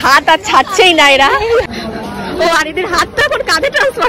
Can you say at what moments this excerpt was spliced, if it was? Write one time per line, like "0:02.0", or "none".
0:01.7